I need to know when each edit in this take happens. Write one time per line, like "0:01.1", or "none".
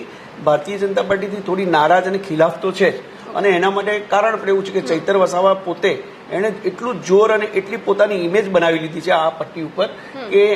none